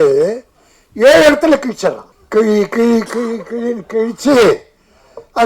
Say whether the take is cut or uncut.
cut